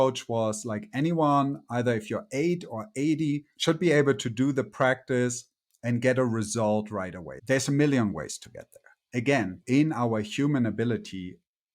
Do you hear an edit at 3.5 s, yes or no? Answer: yes